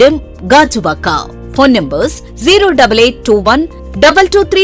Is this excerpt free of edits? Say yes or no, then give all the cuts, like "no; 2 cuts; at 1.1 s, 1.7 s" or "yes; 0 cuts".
yes; 0 cuts